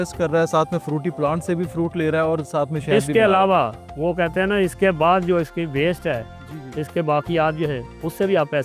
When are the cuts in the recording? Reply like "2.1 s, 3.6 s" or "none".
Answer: none